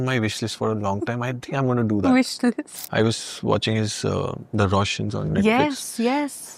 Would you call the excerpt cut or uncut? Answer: cut